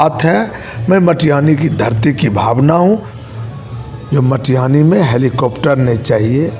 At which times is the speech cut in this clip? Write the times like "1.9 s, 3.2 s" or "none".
3.1 s

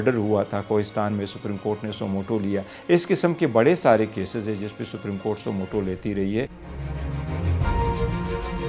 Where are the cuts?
none

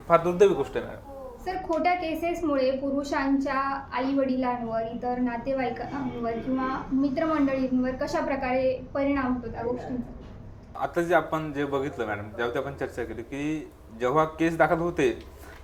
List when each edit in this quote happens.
none

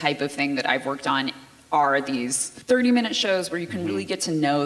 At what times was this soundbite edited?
2.5 s

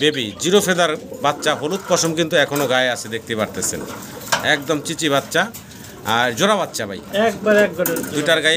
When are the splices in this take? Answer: none

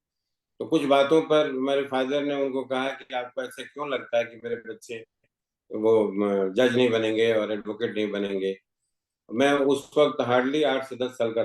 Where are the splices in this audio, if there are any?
none

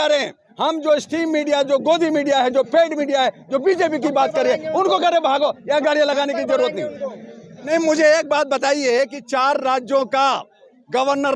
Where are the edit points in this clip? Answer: 7.5 s

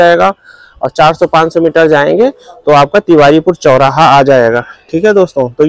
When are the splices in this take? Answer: none

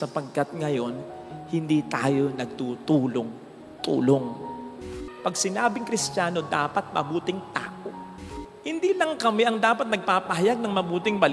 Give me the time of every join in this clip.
4.9 s, 8.1 s

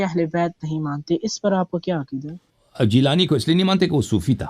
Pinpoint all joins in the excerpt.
2.5 s

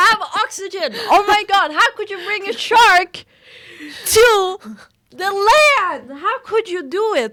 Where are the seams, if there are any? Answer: none

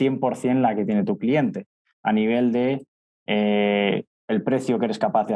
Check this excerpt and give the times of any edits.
none

